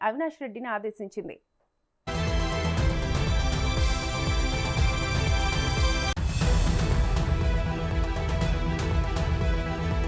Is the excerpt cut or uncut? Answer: uncut